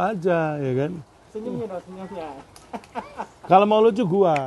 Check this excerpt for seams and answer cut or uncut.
uncut